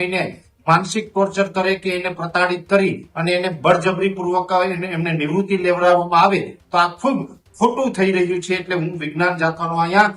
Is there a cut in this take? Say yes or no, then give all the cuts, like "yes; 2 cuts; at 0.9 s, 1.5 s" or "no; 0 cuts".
no; 0 cuts